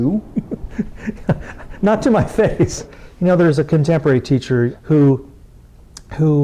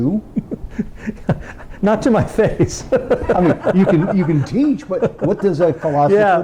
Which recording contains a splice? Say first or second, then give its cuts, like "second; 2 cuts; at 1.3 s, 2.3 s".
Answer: first; 2 cuts; at 2.8 s, 4.7 s